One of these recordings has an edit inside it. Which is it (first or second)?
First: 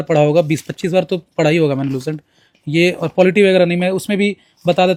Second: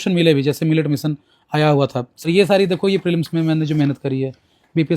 second